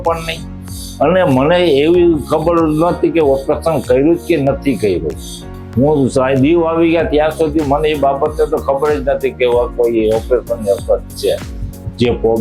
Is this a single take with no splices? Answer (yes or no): no